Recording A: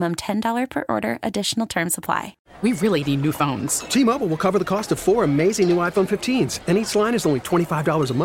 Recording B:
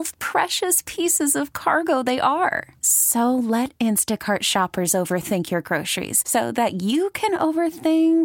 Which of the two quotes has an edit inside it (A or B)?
A